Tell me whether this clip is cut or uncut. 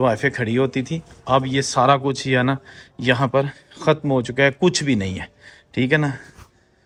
uncut